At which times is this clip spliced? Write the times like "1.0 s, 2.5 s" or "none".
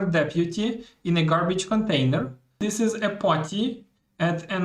2.6 s